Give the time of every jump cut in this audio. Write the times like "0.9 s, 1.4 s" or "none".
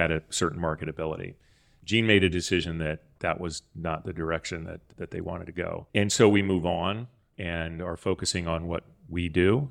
none